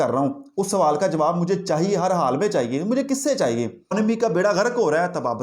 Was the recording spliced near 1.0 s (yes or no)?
no